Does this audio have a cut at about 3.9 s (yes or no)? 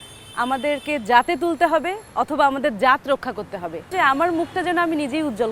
yes